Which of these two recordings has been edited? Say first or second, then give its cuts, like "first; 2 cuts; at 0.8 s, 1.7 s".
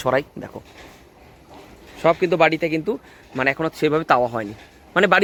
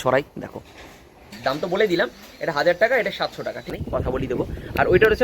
second; 2 cuts; at 1.2 s, 3.7 s